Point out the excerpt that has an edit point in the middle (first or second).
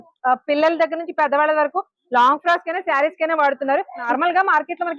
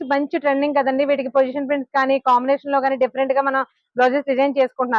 first